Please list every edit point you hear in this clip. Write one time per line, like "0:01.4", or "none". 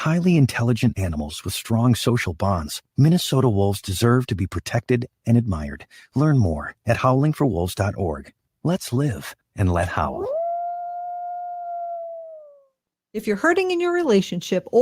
0:13.0